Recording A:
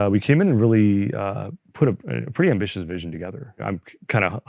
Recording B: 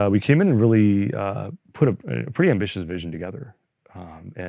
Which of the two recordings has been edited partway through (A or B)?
A